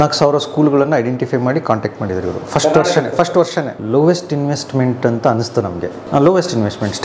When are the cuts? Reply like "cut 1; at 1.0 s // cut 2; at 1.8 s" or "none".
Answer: cut 1; at 3.8 s // cut 2; at 6.0 s